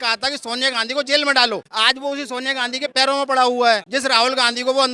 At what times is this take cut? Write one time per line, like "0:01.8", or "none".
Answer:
0:03.9